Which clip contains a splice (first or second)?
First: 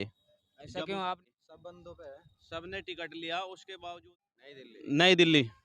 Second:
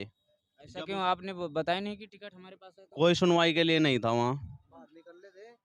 first